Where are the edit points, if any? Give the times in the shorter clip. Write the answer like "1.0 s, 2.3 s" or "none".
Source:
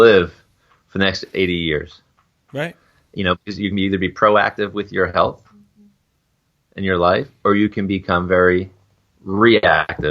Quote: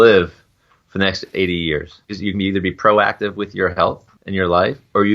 2.1 s, 4.1 s